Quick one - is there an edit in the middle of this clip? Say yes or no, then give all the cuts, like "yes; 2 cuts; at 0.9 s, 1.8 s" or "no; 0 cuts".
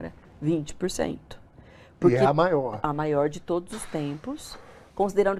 no; 0 cuts